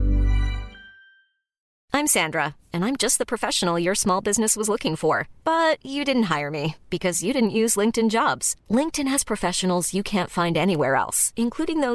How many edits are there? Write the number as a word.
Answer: one